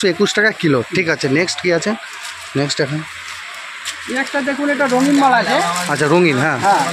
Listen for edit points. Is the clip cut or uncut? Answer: uncut